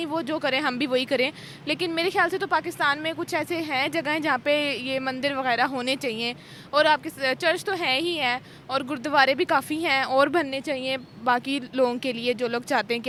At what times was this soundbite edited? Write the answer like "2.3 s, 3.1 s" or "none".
none